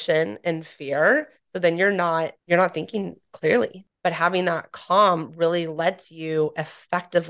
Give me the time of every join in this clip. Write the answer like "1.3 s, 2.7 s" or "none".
2.4 s, 3.8 s

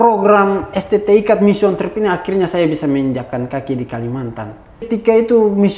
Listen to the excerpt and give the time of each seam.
4.9 s

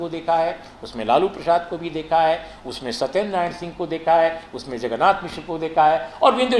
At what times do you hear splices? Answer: none

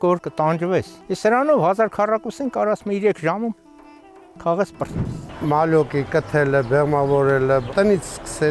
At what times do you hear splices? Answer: 1.0 s, 5.2 s

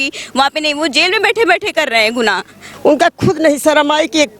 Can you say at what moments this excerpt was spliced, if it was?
2.6 s

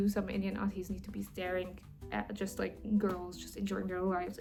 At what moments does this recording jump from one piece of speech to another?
none

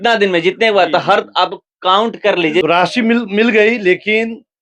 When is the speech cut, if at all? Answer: 2.6 s

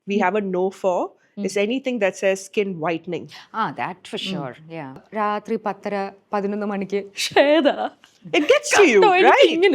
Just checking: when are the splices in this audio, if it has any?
5.0 s

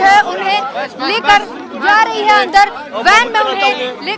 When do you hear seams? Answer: none

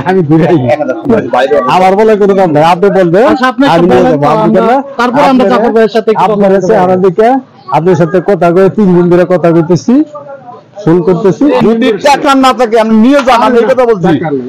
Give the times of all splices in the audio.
1.0 s, 11.6 s

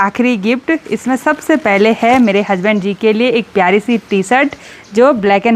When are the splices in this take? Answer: none

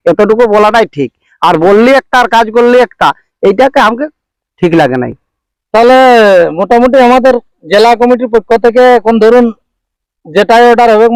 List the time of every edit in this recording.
none

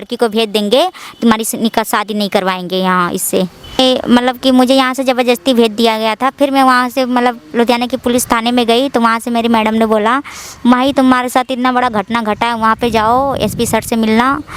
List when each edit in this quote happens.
3.8 s

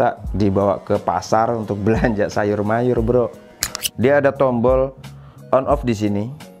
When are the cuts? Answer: 3.8 s

